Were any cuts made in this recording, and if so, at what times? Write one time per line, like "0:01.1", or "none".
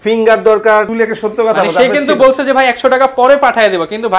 0:00.9